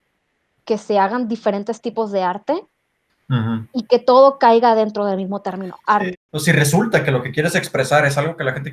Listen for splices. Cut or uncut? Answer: cut